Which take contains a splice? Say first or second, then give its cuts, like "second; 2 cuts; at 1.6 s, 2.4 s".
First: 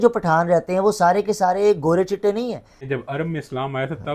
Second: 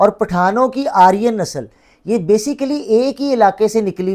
first; 1 cut; at 2.7 s